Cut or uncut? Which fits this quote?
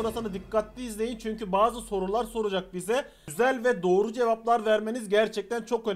uncut